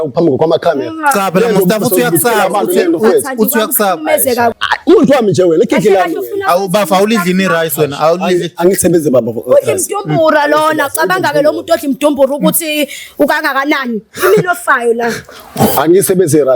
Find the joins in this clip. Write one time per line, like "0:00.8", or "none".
0:04.5